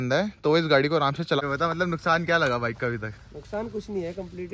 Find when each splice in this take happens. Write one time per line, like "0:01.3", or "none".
0:01.4